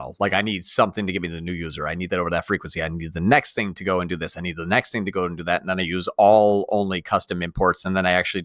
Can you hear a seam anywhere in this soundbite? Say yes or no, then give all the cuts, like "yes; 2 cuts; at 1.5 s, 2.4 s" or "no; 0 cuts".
no; 0 cuts